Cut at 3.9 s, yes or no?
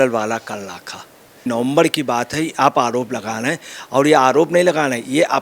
no